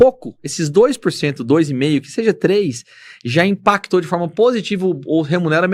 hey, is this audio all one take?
yes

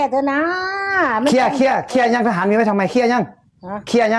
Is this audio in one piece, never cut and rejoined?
yes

